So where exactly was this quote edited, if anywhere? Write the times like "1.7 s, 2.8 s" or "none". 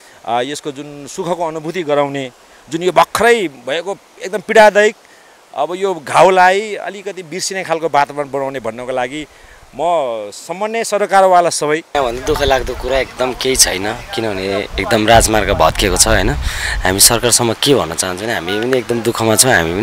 12.0 s